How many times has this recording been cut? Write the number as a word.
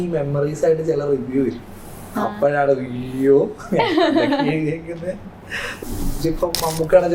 one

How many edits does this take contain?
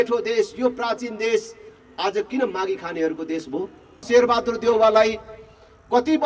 one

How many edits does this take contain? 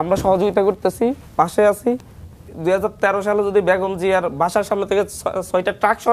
one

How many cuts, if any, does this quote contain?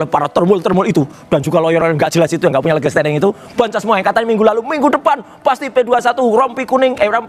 zero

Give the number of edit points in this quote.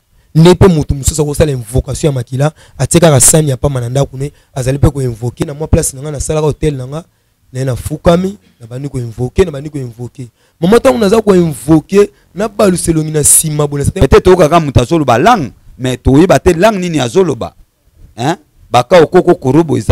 two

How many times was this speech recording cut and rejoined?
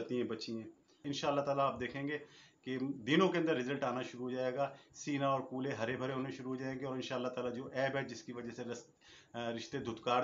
one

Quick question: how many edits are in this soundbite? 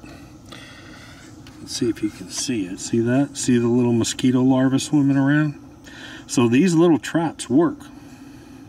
one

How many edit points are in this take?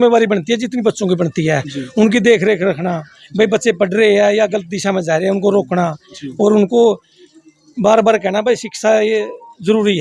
zero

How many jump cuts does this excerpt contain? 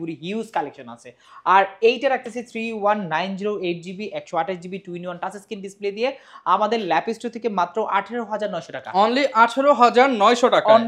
zero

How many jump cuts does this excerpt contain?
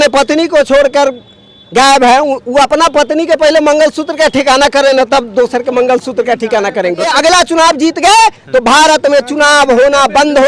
one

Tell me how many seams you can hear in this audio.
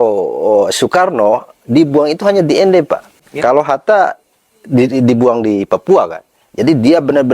one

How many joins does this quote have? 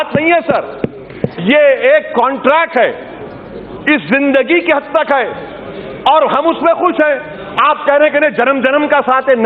zero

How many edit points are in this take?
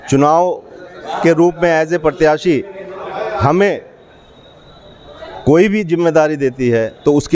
zero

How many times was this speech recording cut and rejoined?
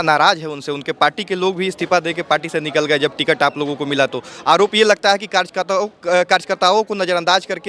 zero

